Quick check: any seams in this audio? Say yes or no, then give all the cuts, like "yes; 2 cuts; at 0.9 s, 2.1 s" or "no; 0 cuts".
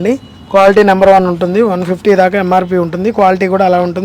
no; 0 cuts